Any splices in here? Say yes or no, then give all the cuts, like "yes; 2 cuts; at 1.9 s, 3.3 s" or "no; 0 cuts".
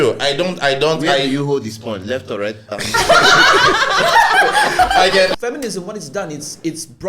yes; 1 cut; at 5.3 s